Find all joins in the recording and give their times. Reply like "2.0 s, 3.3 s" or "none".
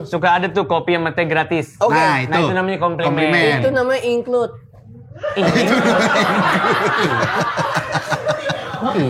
none